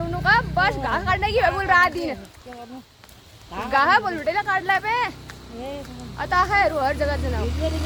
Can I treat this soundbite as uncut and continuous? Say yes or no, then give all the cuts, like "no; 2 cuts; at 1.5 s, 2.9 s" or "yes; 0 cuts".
yes; 0 cuts